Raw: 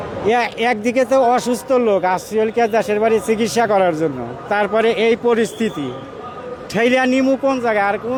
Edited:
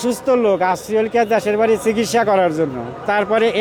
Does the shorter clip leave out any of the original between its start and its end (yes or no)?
no